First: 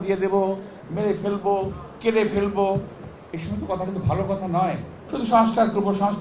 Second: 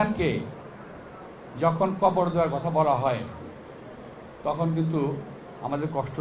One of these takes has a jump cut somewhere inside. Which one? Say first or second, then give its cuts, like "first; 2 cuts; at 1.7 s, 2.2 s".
first; 1 cut; at 4.9 s